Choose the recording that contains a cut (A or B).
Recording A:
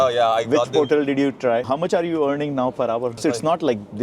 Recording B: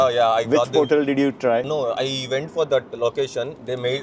A